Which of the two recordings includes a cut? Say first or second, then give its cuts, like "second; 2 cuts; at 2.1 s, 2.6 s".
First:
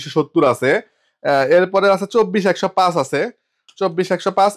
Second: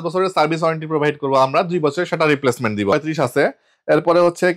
second; 1 cut; at 2.9 s